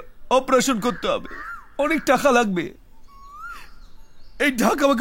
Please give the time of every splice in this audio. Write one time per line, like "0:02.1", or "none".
none

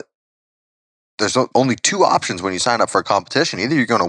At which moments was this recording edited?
0:01.5

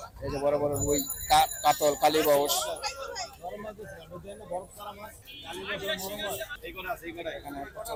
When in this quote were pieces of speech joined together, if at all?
none

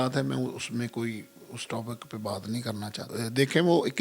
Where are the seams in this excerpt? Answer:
0:03.0

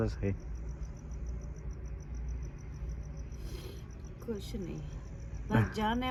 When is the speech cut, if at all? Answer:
none

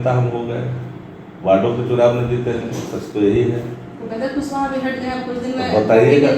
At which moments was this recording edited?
none

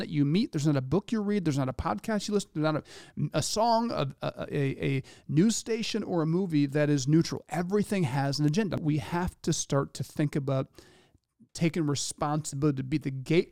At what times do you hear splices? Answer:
0:08.8

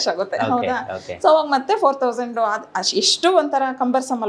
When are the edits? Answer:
none

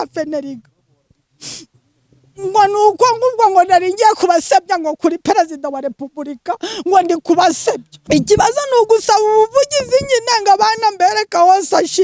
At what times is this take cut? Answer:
0:07.9

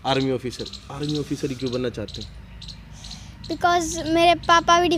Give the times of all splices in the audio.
none

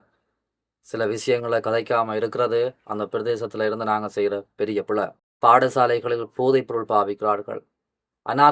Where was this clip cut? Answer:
0:05.2

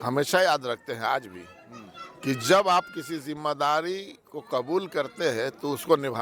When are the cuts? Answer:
none

